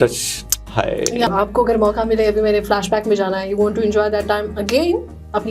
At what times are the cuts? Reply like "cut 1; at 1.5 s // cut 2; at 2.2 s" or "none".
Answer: cut 1; at 1.3 s